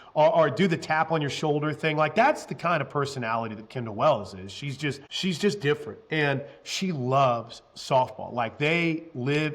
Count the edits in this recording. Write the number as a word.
one